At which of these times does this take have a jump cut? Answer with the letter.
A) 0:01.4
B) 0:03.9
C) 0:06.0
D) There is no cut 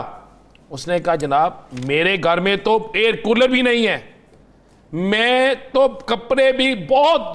D